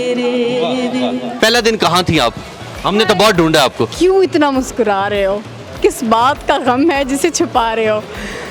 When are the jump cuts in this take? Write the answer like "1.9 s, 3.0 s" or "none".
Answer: 1.3 s, 3.9 s